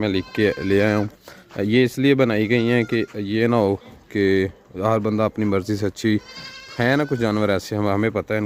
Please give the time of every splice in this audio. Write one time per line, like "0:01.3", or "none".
none